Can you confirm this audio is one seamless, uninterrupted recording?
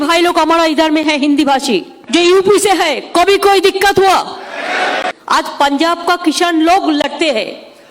no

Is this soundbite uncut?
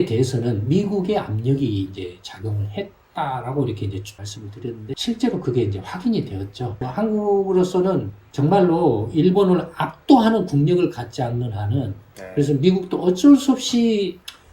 no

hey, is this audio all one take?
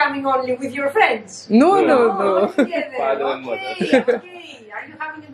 yes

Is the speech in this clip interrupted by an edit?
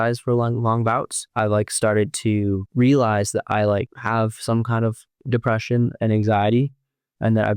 yes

